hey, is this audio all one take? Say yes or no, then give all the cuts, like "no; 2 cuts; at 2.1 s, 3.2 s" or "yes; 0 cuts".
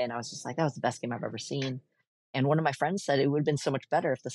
yes; 0 cuts